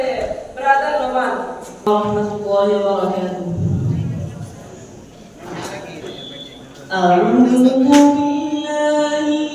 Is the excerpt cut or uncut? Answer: cut